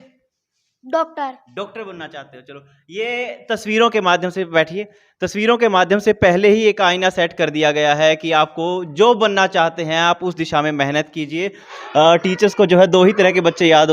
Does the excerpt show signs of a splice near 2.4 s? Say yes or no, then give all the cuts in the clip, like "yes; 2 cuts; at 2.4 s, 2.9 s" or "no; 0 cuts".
no; 1 cut; at 11.8 s